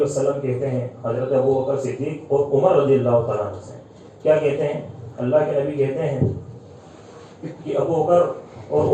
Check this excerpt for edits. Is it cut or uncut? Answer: uncut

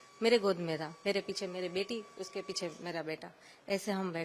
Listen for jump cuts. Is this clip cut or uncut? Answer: uncut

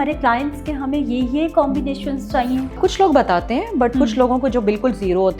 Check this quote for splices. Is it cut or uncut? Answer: cut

